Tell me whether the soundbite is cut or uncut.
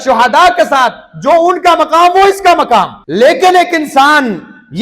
cut